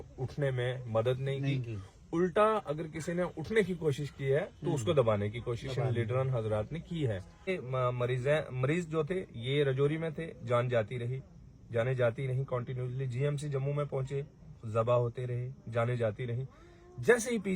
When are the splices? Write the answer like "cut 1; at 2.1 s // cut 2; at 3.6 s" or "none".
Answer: cut 1; at 7.5 s